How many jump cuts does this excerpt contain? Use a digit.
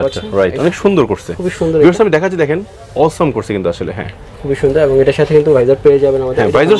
0